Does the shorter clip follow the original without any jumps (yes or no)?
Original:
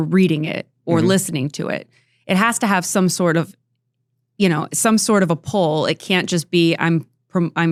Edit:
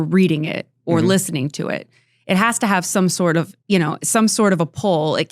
no